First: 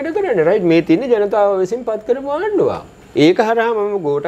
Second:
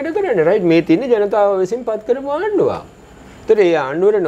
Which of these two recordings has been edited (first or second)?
first